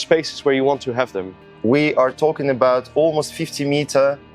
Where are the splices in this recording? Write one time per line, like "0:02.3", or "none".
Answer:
0:01.6